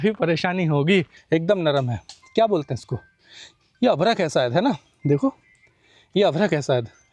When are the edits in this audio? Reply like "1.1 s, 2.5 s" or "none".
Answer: 1.2 s